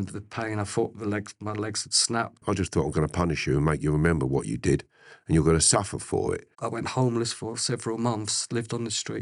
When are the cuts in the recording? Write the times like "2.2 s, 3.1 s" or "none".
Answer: 2.4 s, 6.5 s